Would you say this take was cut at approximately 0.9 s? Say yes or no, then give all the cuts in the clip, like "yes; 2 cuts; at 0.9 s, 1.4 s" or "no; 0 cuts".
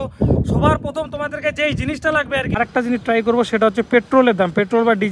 no; 1 cut; at 2.5 s